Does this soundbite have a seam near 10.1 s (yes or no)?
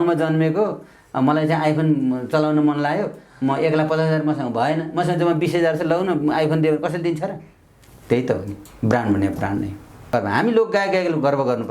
yes